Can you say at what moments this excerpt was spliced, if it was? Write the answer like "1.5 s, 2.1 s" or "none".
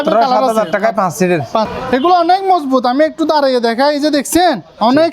1.7 s

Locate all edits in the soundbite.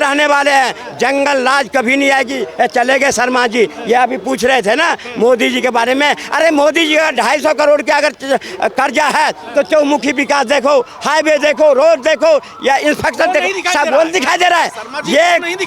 none

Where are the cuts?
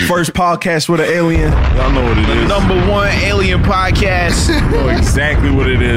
none

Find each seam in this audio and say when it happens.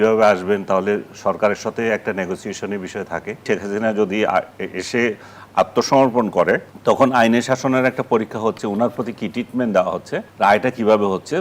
3.5 s

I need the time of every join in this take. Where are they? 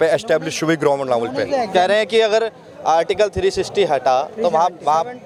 none

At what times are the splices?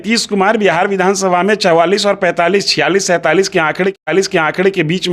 none

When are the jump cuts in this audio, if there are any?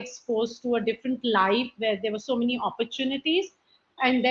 none

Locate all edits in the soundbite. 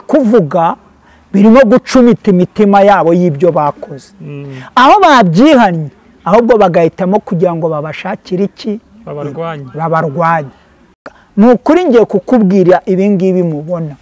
11.1 s

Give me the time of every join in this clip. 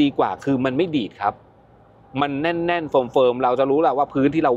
none

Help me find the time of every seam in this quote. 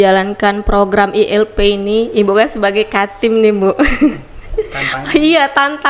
none

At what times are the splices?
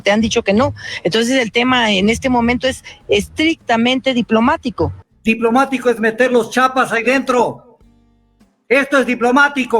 5.0 s

